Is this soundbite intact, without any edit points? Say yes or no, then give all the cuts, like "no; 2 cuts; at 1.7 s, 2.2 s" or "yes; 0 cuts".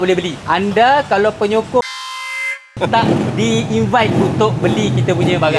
yes; 0 cuts